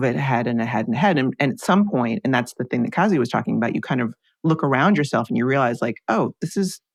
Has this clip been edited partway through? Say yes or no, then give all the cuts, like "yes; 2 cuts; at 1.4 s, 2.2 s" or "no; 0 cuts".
no; 0 cuts